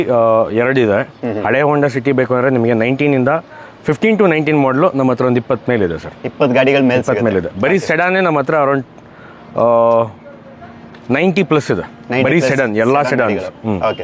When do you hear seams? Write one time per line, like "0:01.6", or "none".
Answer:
none